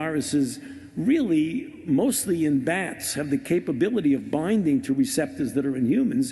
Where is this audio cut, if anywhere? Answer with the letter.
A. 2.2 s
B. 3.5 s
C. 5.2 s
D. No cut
B